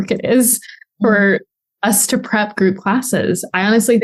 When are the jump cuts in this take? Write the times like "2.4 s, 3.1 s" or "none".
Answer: none

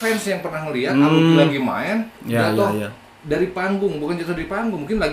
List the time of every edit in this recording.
2.2 s

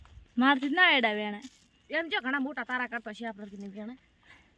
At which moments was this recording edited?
none

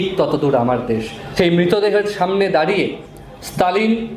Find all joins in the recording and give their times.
1.2 s

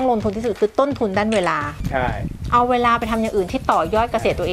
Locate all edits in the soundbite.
none

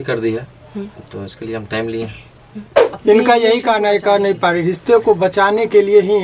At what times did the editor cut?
2.9 s

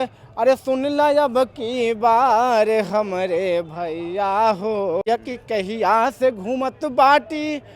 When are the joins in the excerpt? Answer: 5.0 s

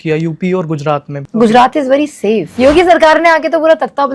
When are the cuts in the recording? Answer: 1.1 s, 2.5 s

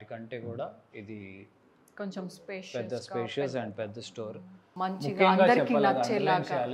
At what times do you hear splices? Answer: 4.7 s

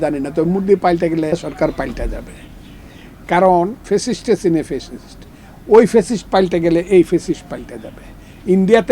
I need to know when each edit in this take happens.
1.3 s, 3.8 s

